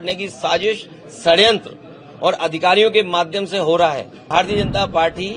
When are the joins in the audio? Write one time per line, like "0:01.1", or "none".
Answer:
0:04.3